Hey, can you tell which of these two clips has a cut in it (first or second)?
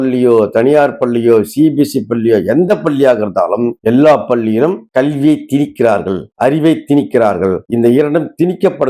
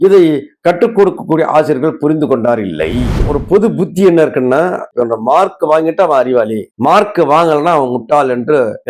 second